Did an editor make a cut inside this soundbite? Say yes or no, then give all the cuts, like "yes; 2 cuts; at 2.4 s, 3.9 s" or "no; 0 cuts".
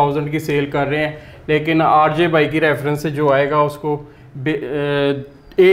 no; 0 cuts